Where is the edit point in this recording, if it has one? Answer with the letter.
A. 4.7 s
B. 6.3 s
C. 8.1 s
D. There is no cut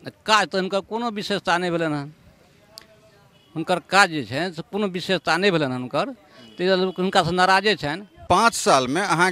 C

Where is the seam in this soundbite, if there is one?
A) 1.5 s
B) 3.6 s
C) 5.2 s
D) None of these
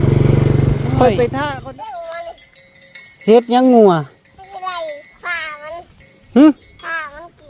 A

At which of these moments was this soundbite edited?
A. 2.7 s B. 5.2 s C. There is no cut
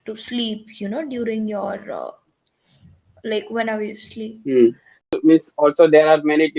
B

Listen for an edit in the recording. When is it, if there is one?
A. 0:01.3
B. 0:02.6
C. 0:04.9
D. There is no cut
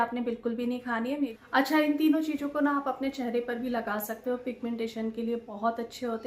A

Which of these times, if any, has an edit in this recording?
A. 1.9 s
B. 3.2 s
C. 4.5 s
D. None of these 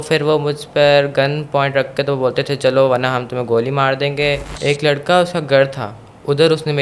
C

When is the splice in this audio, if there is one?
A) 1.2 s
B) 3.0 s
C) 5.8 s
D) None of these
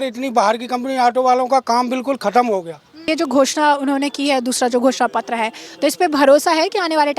B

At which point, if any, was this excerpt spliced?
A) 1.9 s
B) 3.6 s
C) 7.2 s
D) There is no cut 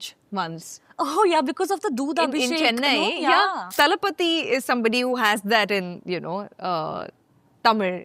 B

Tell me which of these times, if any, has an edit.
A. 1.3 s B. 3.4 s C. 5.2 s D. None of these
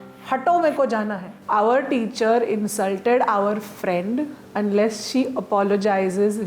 A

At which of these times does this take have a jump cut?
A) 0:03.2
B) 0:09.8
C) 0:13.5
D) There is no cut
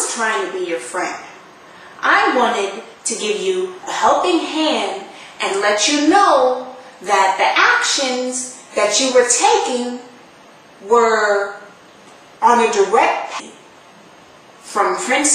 D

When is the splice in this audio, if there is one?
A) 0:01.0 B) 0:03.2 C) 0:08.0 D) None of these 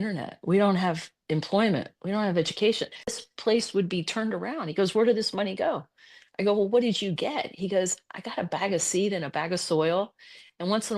B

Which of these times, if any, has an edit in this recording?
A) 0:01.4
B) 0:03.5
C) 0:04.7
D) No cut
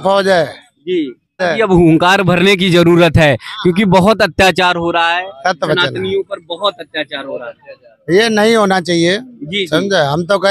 A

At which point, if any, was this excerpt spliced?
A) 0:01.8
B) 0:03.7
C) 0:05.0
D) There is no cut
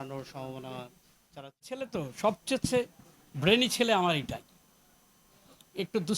A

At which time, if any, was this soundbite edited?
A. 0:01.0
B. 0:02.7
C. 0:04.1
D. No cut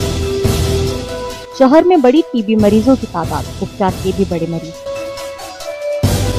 D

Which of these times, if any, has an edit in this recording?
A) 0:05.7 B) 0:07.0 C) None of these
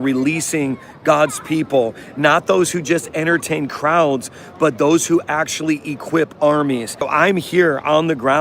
B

